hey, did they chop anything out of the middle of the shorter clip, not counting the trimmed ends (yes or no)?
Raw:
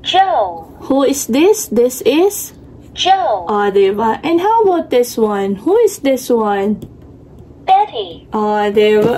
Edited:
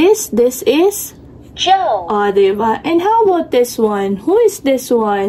no